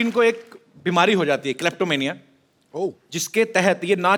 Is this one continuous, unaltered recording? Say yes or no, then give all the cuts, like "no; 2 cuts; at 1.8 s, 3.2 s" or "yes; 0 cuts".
yes; 0 cuts